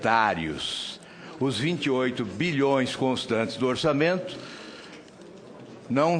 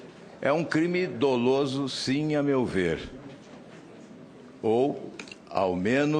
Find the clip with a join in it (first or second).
second